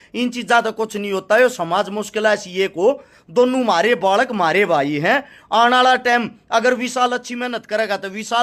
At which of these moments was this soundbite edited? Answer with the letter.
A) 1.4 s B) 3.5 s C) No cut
C